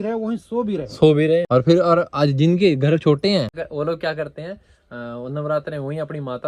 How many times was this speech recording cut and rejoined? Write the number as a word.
one